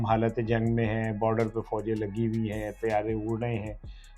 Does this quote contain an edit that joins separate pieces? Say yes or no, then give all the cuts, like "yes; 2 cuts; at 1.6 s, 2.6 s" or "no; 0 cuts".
no; 0 cuts